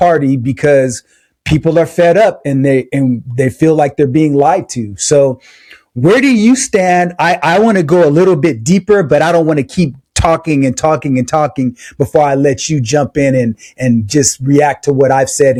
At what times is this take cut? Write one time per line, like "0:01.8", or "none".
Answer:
none